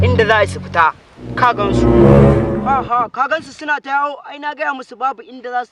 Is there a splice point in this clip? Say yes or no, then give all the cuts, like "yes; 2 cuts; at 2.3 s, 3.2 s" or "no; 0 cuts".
no; 0 cuts